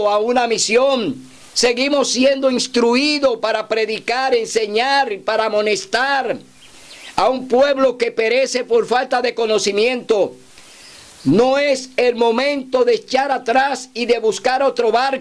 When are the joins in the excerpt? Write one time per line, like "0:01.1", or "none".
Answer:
none